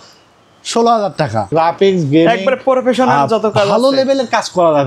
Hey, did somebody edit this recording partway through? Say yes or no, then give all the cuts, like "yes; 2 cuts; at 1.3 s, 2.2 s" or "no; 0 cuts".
yes; 1 cut; at 1.5 s